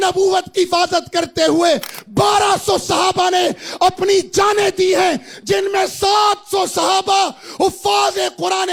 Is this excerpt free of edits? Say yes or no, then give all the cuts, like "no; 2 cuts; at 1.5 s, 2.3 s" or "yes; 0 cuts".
yes; 0 cuts